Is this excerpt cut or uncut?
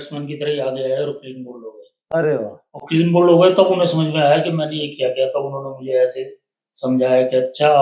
uncut